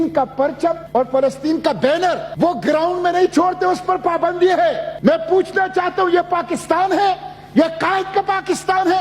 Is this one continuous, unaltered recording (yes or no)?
no